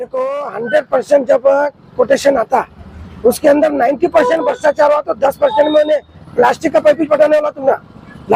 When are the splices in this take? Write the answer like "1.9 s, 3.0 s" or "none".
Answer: none